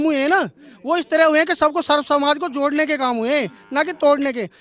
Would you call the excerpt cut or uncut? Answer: uncut